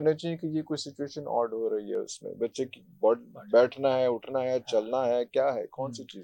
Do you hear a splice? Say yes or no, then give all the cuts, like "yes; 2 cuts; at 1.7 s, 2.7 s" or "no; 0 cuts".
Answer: no; 0 cuts